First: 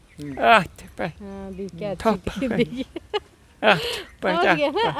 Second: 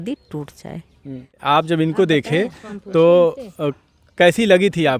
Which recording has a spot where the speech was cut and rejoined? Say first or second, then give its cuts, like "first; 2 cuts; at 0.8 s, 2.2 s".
second; 1 cut; at 1.4 s